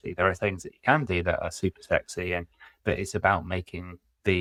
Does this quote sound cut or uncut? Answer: uncut